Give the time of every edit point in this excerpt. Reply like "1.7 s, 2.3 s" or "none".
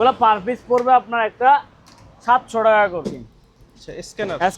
3.0 s